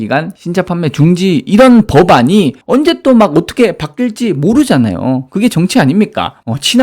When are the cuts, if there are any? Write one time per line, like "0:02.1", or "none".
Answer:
0:02.6

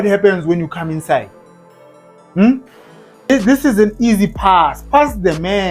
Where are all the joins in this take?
0:03.3

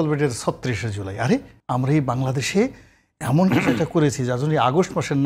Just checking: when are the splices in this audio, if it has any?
0:01.6

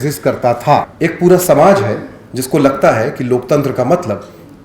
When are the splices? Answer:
0:00.9

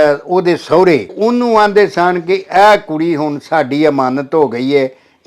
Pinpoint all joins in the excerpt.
0:01.1

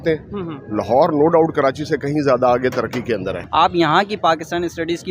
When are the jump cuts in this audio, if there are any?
0:03.4

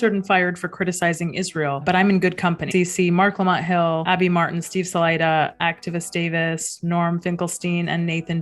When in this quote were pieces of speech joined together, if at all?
0:02.6

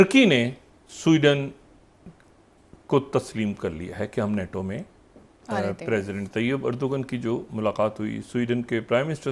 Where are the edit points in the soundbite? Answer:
none

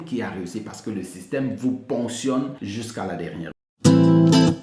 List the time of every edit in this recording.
0:02.6
0:03.5

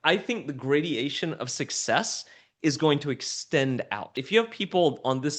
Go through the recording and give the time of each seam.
0:04.2

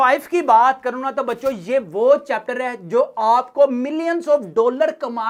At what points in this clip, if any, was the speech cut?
none

